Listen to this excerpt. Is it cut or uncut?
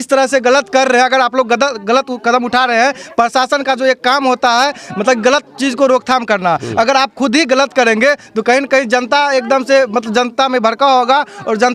uncut